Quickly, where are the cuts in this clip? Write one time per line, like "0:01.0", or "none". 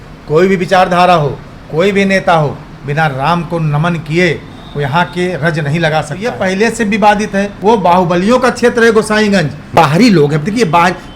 0:06.3
0:07.5
0:09.8